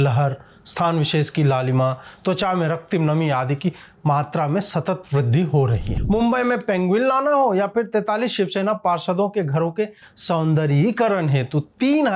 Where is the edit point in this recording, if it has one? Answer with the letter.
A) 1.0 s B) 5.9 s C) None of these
B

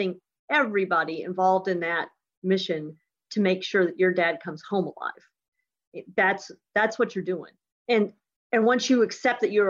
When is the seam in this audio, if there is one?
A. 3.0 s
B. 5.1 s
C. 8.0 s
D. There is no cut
C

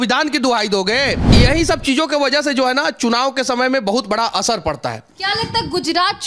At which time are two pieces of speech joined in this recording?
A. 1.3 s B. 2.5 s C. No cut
A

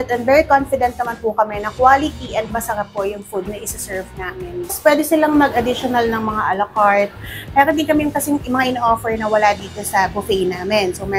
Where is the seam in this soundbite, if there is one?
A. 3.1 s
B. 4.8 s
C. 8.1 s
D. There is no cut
B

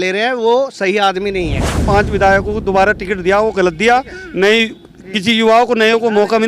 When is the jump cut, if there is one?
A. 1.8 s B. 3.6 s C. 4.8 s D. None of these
A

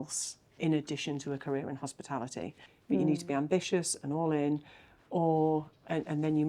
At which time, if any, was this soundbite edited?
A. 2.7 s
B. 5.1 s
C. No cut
A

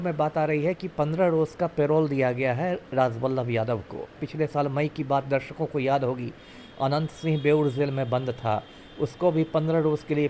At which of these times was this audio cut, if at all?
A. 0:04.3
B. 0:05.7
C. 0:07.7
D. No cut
A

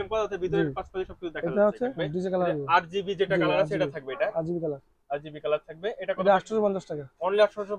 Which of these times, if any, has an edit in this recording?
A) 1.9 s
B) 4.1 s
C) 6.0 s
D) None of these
A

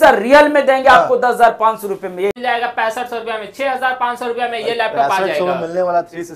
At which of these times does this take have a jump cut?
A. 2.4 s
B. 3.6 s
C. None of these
A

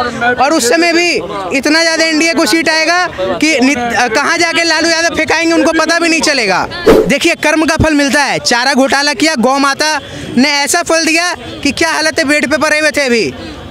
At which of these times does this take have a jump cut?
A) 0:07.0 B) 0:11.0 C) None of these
A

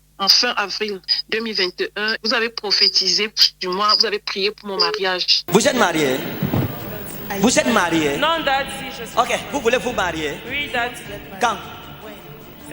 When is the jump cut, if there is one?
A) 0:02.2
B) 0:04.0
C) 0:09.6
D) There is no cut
A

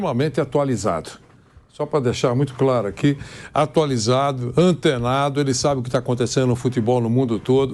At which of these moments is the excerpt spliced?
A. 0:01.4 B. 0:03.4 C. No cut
C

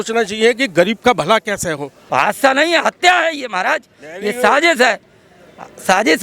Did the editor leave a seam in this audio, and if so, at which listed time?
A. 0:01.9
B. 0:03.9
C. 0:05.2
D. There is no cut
A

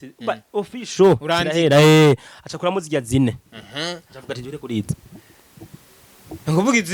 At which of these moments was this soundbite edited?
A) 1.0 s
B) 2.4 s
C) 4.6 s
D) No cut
D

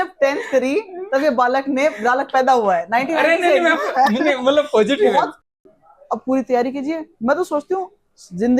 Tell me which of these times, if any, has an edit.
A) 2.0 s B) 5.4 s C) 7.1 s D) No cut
B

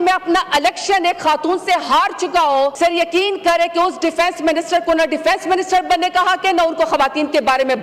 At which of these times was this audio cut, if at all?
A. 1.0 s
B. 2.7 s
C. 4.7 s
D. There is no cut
B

